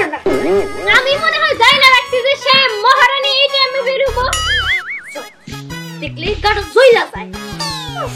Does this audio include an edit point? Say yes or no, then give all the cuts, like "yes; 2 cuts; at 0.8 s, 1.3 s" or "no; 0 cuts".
no; 0 cuts